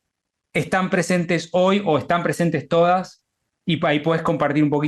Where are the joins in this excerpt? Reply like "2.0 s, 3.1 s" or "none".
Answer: none